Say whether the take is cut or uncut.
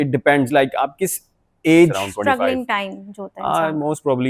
cut